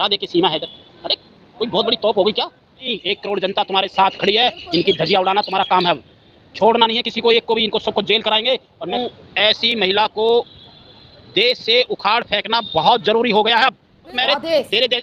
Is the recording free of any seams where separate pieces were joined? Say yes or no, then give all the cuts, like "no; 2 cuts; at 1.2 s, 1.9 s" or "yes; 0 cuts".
no; 3 cuts; at 2.9 s, 9.0 s, 14.1 s